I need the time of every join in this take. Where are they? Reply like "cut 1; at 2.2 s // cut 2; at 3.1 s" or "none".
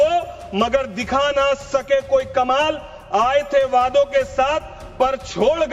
none